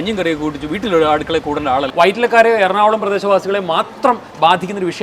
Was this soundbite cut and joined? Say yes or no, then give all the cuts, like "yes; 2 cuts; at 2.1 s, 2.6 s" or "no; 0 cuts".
yes; 1 cut; at 1.9 s